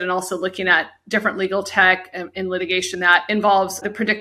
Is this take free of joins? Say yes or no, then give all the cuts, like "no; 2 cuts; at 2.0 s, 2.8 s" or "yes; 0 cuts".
no; 1 cut; at 3.1 s